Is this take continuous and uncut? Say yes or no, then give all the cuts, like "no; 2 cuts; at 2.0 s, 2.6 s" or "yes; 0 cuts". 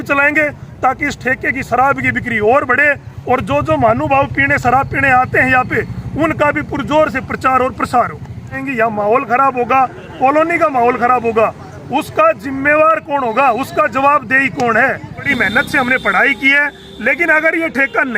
no; 2 cuts; at 8.6 s, 15.3 s